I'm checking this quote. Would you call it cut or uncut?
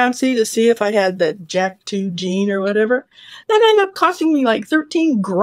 uncut